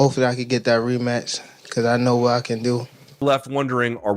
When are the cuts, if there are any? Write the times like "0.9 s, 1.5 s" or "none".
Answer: 3.2 s